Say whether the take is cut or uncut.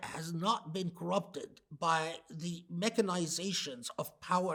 uncut